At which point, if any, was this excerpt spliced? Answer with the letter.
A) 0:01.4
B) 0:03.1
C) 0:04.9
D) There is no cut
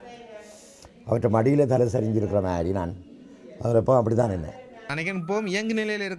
C